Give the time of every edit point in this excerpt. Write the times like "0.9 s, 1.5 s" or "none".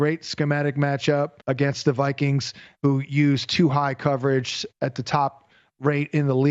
1.4 s